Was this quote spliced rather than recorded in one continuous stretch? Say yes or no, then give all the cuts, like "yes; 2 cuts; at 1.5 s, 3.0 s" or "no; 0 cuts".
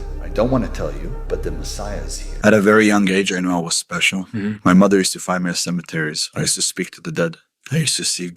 yes; 1 cut; at 2.3 s